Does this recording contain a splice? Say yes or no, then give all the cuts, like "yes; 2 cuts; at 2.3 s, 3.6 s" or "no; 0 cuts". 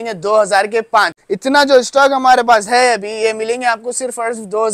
yes; 1 cut; at 1.2 s